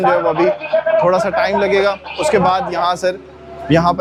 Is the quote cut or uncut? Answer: uncut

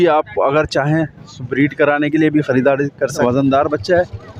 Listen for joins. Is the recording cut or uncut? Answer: cut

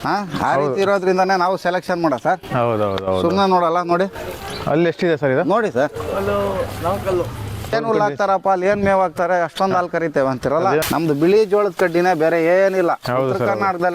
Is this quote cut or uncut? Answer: cut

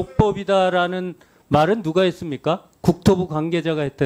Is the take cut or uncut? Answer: uncut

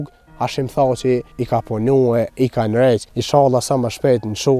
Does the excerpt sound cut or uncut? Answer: cut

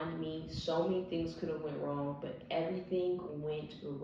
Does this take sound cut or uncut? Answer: uncut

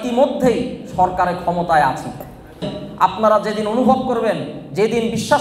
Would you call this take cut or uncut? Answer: cut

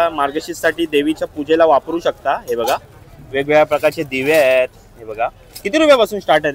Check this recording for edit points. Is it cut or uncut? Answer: uncut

